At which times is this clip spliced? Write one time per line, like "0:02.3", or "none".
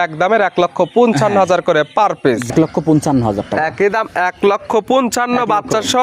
0:02.5